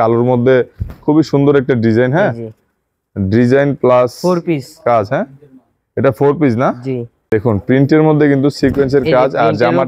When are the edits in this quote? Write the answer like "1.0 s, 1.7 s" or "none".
7.2 s